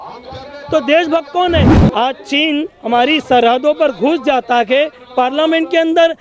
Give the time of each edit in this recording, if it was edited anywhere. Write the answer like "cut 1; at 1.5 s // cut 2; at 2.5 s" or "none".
cut 1; at 1.8 s